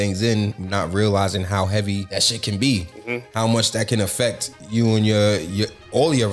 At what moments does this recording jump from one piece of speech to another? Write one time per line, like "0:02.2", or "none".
0:02.1